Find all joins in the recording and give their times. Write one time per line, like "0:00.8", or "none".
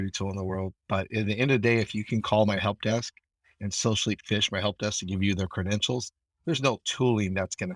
none